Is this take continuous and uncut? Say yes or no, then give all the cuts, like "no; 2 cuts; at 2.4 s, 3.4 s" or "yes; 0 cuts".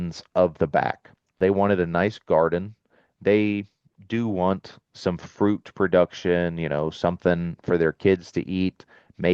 no; 1 cut; at 1.4 s